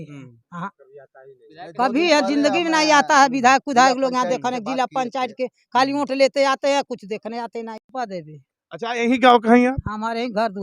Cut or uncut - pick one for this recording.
cut